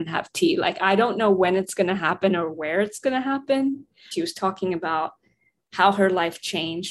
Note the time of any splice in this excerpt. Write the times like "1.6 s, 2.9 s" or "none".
4.0 s